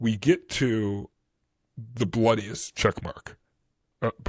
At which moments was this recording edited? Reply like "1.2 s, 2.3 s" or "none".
none